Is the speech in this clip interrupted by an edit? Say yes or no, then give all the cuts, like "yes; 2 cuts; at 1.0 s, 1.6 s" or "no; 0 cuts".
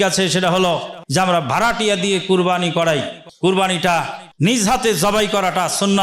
yes; 3 cuts; at 1.0 s, 3.2 s, 4.2 s